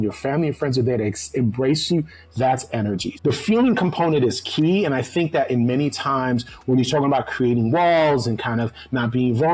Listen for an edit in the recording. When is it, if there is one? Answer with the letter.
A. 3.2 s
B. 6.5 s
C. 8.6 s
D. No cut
A